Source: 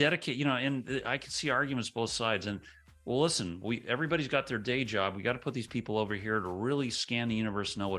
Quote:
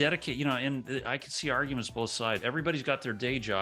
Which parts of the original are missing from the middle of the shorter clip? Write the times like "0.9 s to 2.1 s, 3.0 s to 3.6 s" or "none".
2.4 s to 3.9 s